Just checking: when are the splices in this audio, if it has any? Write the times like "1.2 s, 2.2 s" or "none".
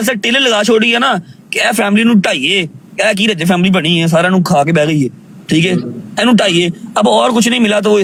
none